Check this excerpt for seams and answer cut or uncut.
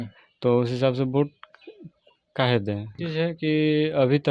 cut